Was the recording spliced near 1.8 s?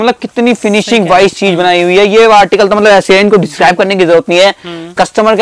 no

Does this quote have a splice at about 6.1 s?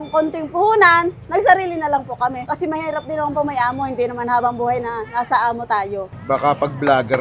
yes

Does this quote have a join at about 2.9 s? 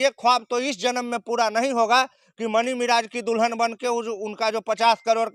no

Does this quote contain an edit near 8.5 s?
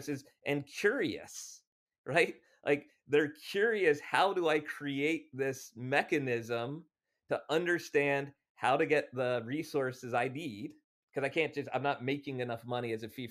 no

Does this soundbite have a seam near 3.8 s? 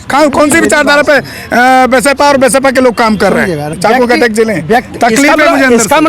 yes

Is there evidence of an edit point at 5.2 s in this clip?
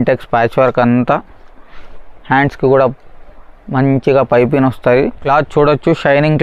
yes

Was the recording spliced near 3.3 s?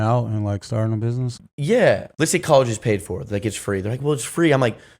no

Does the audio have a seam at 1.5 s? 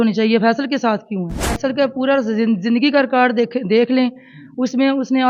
yes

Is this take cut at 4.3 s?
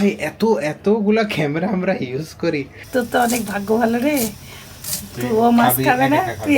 no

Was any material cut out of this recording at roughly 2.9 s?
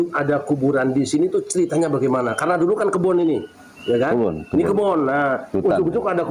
no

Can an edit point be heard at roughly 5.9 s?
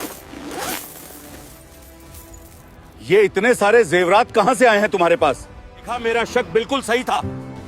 yes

